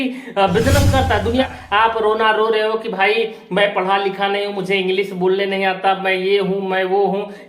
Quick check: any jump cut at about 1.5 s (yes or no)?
yes